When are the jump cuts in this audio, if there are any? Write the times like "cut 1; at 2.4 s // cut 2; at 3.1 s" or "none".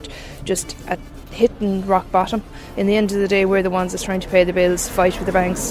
cut 1; at 2.6 s